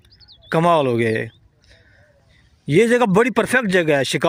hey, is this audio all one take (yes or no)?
yes